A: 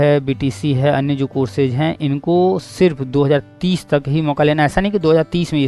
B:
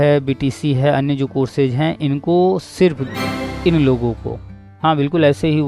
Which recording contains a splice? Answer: B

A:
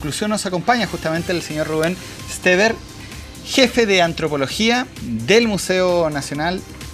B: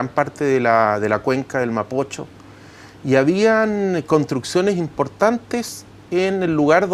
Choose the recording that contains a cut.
B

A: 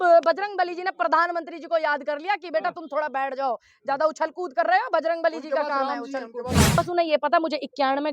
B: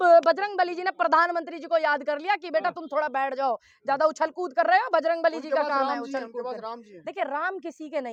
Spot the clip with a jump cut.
A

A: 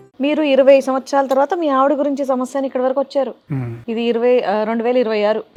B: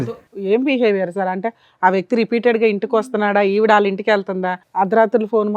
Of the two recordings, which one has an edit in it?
B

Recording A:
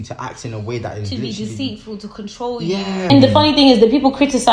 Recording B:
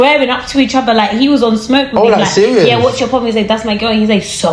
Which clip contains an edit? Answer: A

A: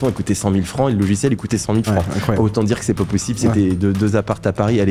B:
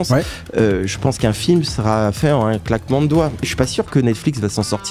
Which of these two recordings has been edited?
B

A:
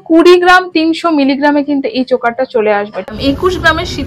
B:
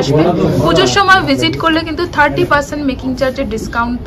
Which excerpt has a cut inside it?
A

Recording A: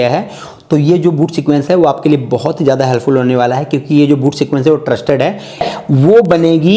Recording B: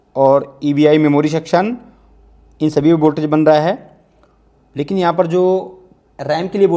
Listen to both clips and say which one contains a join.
A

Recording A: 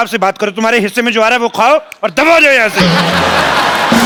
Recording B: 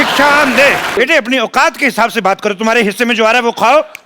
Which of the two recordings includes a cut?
B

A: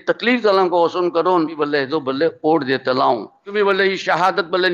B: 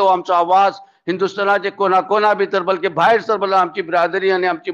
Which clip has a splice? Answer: A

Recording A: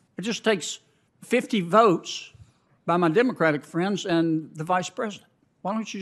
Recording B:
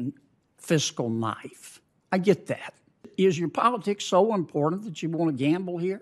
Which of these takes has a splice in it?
B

